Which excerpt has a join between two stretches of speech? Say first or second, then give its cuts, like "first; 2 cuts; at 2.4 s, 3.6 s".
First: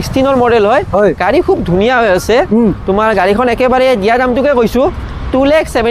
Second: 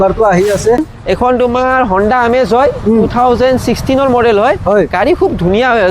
second; 1 cut; at 0.9 s